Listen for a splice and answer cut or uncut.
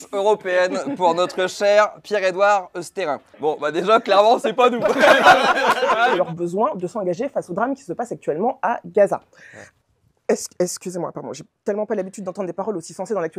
cut